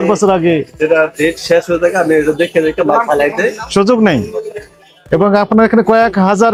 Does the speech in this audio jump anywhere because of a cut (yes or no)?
no